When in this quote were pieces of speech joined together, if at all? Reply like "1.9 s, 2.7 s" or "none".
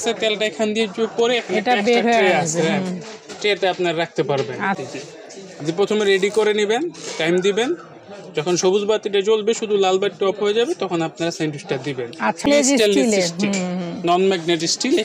4.8 s, 12.5 s